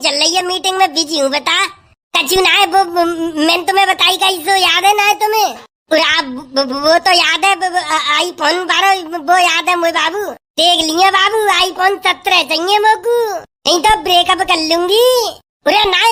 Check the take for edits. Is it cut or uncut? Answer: uncut